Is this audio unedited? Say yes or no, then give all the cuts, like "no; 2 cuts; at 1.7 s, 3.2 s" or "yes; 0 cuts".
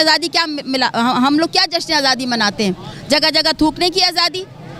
yes; 0 cuts